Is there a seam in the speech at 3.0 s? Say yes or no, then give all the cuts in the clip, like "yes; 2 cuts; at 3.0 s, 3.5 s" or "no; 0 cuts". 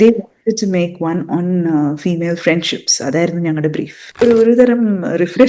no; 1 cut; at 4.2 s